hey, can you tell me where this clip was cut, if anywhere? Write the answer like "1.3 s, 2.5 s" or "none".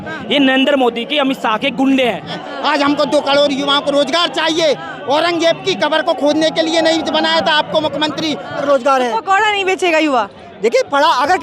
2.4 s, 8.6 s

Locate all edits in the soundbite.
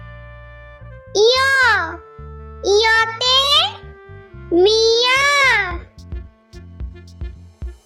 none

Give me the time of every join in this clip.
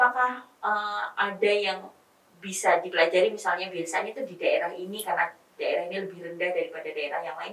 none

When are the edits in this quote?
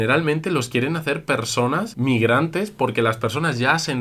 none

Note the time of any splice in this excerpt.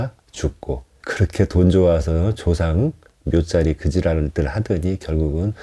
0.9 s

